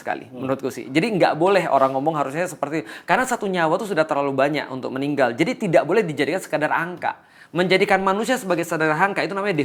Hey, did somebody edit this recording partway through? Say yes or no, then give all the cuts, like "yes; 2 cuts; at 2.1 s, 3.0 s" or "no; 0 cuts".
no; 0 cuts